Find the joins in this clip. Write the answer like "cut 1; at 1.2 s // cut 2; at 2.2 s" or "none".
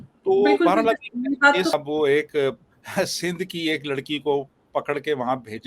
cut 1; at 1.7 s